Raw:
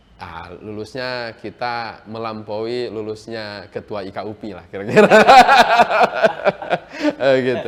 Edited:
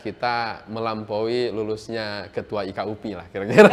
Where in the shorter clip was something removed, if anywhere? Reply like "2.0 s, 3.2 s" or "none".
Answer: none